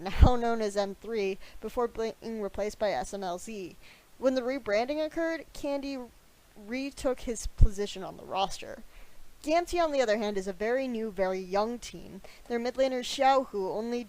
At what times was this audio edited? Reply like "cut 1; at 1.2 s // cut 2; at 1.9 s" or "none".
cut 1; at 12.7 s